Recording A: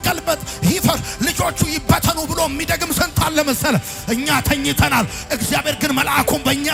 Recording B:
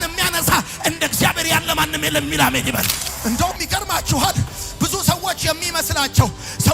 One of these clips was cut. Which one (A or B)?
B